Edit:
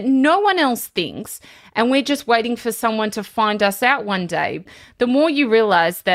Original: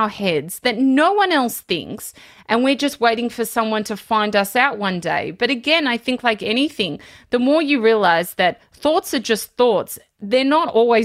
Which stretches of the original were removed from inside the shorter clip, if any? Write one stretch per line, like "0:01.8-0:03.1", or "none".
0:05.3-0:06.9

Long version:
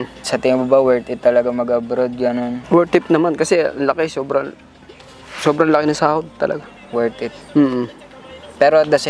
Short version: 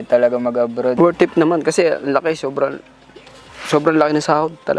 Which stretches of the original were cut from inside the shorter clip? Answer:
0:02.1-0:02.7

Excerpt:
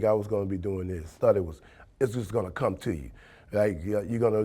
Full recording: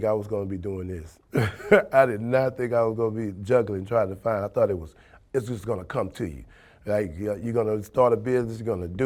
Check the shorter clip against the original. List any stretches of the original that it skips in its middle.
0:01.1-0:04.5

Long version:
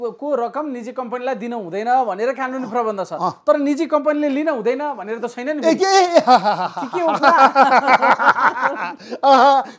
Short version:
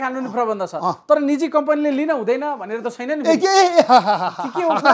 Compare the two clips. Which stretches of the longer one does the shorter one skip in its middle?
none

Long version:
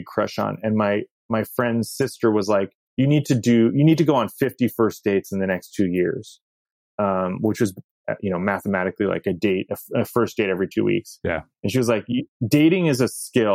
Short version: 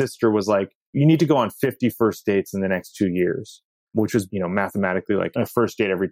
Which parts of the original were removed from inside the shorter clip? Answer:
0:02.9-0:03.7
0:06.8-0:07.9
0:09.2-0:09.9

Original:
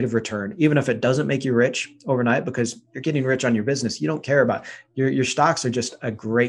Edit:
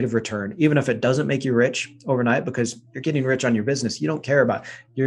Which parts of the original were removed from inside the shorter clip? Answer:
none

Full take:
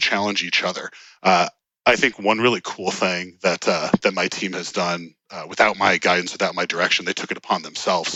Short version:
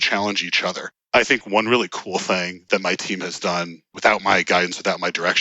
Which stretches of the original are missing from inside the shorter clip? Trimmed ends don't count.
0:00.9-0:01.6
0:03.4-0:04.0
0:05.2-0:05.4

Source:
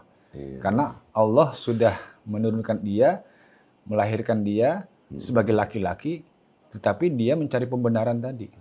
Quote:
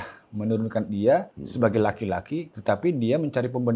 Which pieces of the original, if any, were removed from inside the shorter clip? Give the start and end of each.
0:03.3-0:05.1
0:06.2-0:06.7

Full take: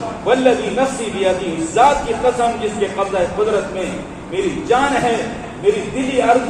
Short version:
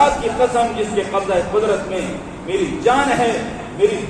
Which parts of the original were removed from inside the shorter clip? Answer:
none

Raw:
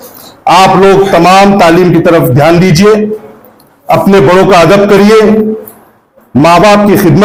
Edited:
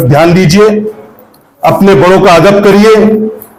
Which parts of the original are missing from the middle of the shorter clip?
none

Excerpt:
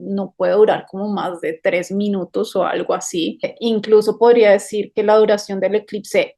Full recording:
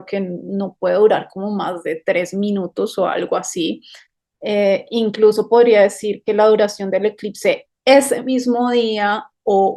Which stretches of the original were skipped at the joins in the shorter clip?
0:04.0-0:04.8

